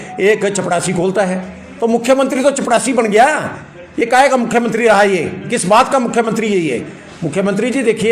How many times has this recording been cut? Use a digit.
0